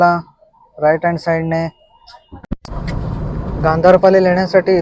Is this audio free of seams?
no; 1 cut; at 2.4 s

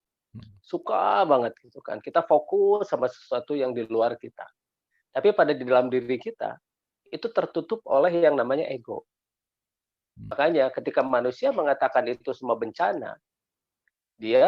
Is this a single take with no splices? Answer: no; 1 cut; at 10.3 s

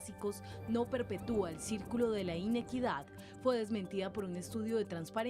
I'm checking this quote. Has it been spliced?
no; 0 cuts

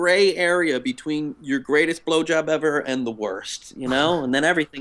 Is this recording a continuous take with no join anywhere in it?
yes; 0 cuts

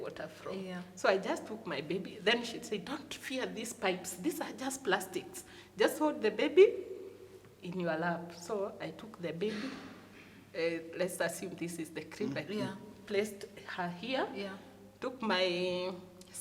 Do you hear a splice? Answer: no; 0 cuts

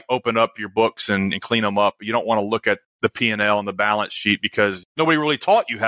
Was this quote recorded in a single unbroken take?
no; 2 cuts; at 2.9 s, 4.8 s

